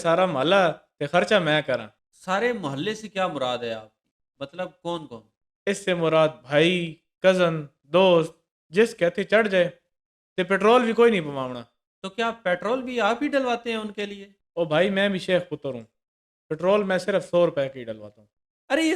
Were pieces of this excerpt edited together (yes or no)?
no